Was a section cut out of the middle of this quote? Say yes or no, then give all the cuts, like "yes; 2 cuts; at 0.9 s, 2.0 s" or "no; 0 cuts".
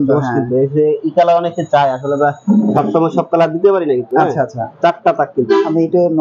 no; 0 cuts